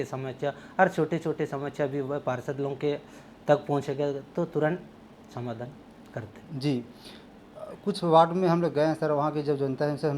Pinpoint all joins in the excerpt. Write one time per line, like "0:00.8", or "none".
none